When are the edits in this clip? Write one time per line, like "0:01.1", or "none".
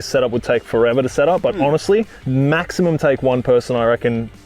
0:02.2